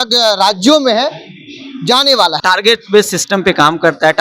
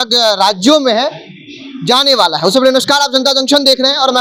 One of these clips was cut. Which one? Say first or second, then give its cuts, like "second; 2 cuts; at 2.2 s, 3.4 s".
first; 1 cut; at 2.4 s